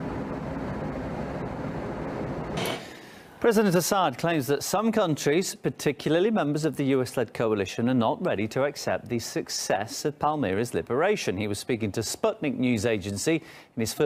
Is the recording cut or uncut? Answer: uncut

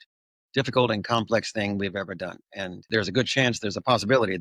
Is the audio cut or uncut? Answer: cut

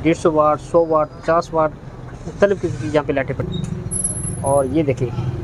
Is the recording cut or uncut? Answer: uncut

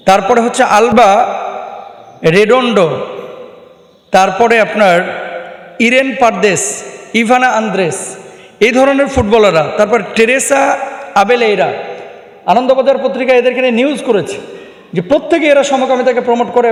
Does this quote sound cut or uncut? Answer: uncut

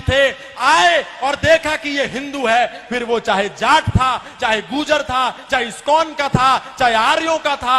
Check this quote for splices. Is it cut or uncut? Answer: uncut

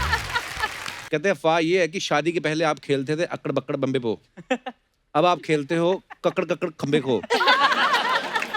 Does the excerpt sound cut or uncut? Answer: cut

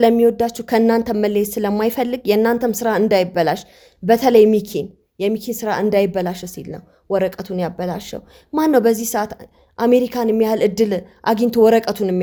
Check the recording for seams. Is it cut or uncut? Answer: uncut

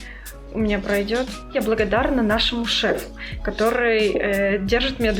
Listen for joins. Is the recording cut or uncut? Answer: cut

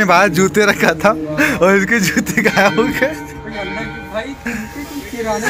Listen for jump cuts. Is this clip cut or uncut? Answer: uncut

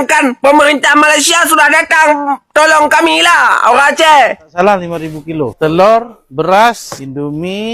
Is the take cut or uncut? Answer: cut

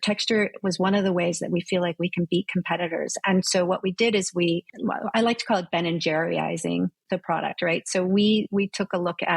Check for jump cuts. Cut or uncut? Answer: cut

